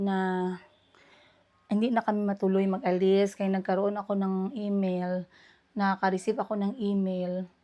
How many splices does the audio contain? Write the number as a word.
zero